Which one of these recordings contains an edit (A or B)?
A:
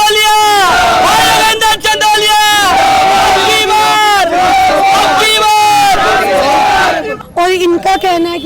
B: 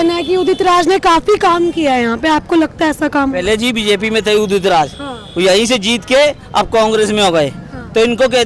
A